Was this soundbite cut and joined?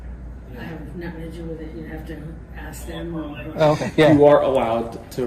yes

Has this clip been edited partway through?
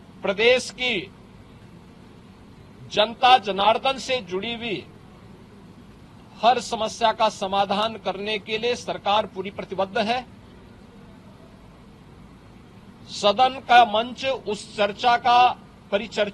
no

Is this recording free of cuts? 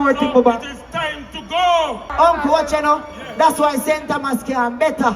no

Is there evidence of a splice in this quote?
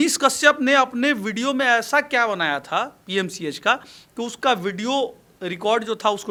no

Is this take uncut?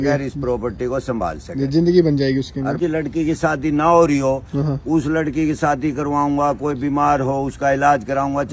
no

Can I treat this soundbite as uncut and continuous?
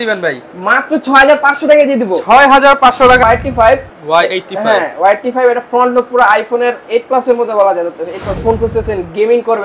no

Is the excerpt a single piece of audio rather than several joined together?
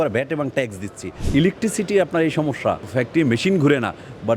no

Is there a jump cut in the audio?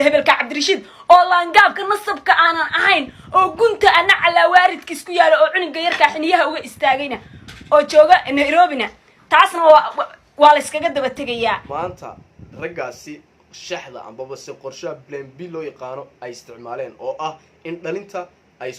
yes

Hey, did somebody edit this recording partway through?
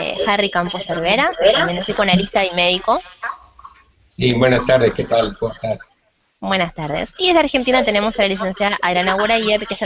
yes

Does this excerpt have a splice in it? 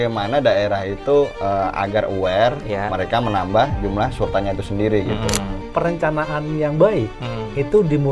yes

